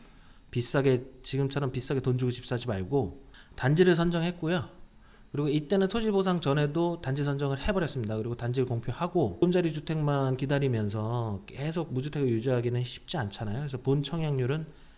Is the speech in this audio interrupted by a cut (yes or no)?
yes